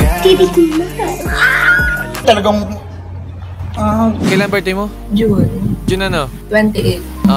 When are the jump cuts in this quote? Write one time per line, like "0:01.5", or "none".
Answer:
0:04.2